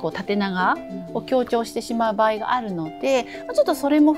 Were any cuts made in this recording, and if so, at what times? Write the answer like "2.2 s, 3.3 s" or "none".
none